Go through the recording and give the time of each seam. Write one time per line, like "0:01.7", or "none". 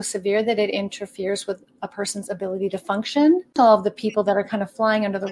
0:03.5